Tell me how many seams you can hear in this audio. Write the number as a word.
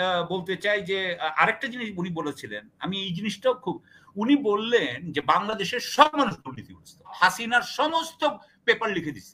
one